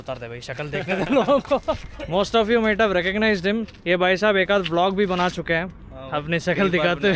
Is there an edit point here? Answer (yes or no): no